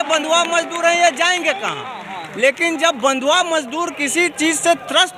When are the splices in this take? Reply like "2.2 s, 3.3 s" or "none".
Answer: none